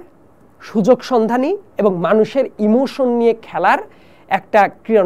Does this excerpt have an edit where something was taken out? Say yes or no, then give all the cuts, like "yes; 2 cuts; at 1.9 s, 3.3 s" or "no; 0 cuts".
no; 0 cuts